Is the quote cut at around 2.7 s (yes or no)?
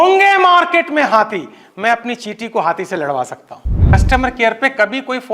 no